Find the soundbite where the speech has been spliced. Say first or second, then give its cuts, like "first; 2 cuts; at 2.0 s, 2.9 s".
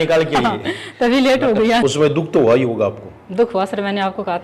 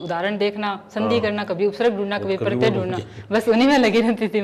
first; 1 cut; at 1.8 s